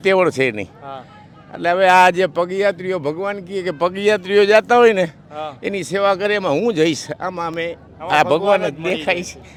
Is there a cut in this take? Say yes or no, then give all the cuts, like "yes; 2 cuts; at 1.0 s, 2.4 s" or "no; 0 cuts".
no; 0 cuts